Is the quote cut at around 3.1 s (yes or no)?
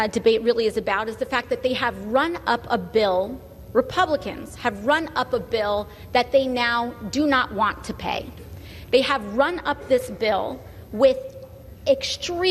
no